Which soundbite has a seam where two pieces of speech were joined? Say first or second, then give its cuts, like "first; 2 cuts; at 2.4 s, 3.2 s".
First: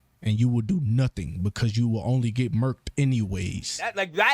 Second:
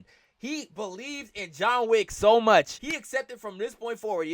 second; 1 cut; at 2.8 s